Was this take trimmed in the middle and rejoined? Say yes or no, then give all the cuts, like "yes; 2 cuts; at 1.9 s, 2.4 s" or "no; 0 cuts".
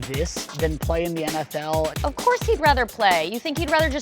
yes; 1 cut; at 2.2 s